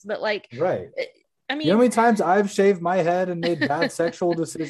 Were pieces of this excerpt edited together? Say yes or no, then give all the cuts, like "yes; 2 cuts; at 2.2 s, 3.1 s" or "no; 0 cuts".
yes; 1 cut; at 1.3 s